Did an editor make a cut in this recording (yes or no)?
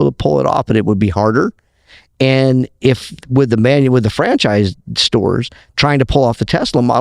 no